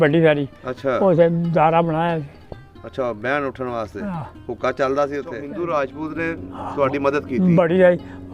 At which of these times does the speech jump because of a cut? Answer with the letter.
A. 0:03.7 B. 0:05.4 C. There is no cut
B